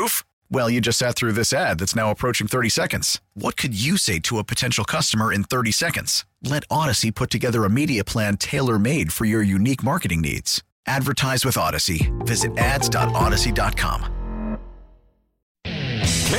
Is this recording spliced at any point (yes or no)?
yes